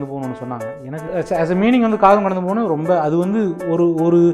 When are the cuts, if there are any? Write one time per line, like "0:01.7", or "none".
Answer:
0:01.1

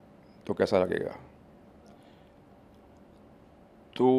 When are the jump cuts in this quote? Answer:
none

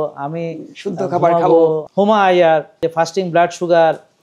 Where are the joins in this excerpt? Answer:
0:01.8
0:02.8

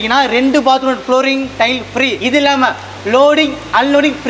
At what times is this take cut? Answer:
none

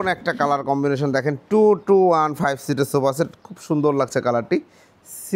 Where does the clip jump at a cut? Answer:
none

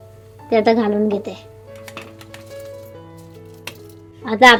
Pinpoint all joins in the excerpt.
none

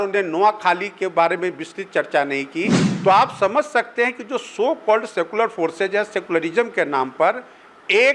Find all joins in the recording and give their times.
0:02.8

